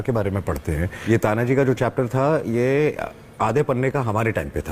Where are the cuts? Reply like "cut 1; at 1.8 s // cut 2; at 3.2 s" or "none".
cut 1; at 0.9 s